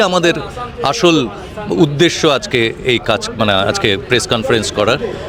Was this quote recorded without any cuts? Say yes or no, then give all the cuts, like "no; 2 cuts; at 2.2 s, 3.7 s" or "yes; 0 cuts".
yes; 0 cuts